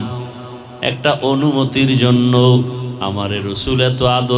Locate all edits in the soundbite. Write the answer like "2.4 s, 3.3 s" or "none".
2.9 s